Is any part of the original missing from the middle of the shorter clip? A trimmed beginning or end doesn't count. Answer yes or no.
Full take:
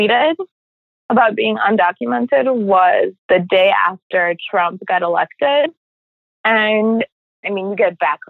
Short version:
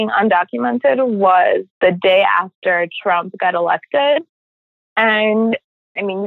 no